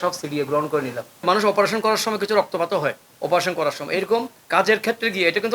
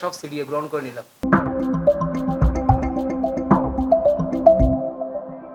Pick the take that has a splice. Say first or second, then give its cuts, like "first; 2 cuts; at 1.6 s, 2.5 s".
first; 3 cuts; at 1.1 s, 3.1 s, 4.4 s